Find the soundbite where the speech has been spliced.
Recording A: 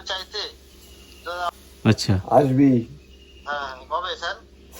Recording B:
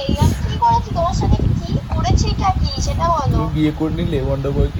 A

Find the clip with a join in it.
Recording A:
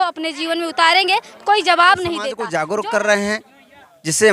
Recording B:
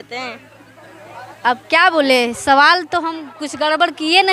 A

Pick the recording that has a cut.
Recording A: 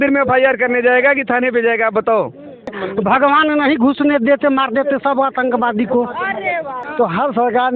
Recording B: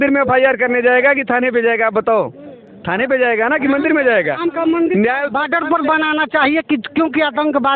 A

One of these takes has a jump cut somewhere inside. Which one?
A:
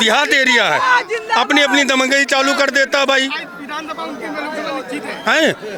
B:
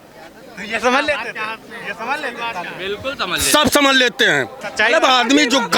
B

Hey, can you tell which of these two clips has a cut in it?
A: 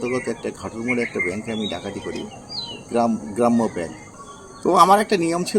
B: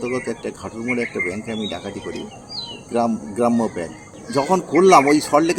A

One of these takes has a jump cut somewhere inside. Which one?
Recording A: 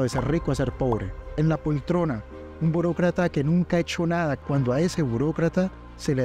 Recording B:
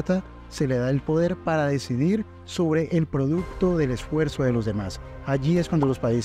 A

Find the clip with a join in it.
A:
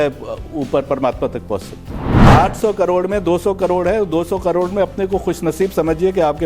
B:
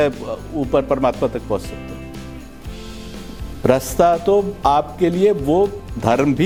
A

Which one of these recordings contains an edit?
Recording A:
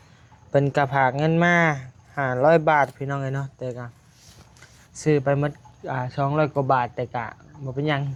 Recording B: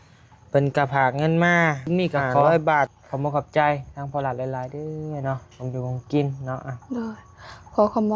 B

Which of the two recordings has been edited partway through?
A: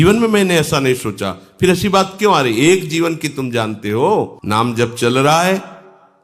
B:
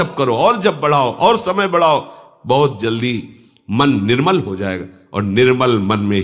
A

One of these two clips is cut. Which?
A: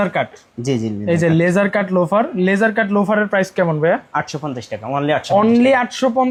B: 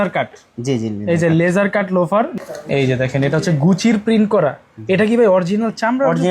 B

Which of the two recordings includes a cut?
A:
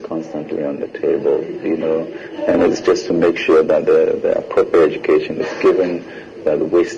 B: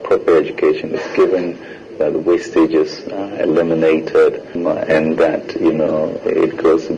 B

